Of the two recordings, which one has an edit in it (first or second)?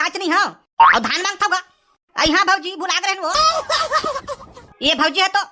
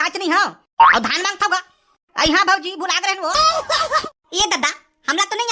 second